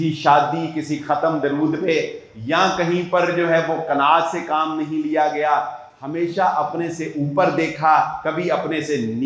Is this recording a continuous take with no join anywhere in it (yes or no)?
yes